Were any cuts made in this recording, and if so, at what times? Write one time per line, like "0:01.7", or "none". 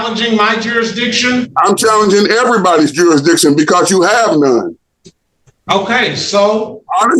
none